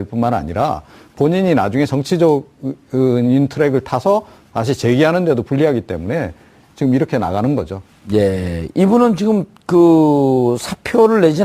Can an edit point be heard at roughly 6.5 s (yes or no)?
no